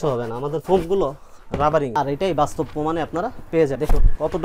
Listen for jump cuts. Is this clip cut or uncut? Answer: cut